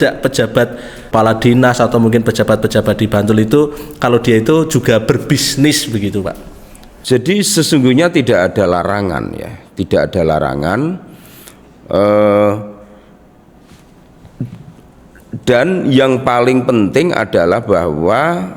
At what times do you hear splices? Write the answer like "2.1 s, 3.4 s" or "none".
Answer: 1.1 s